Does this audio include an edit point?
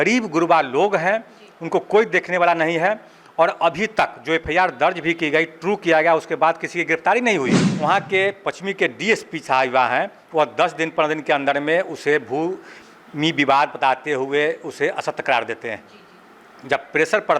yes; 1 cut; at 7.6 s

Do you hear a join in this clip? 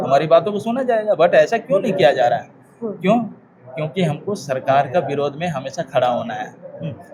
no; 0 cuts

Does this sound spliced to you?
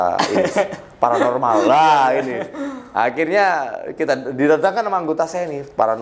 no; 0 cuts

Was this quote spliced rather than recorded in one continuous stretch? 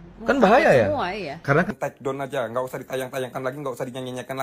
yes; 1 cut; at 1.7 s

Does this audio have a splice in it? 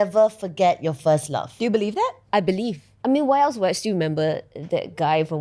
yes; 1 cut; at 1.5 s

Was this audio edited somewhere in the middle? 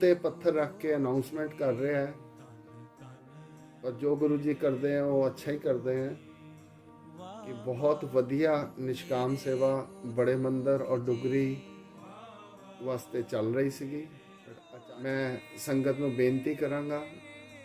yes; 1 cut; at 14.4 s

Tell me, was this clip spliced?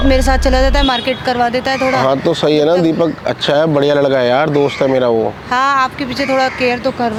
no; 0 cuts

